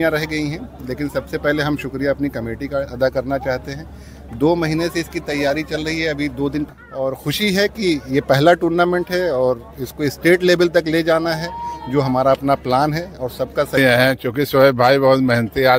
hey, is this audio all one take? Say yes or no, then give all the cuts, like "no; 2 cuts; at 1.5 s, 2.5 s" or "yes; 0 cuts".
no; 2 cuts; at 6.6 s, 13.8 s